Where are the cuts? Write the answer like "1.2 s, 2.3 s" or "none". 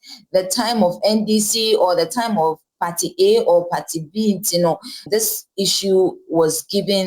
5.1 s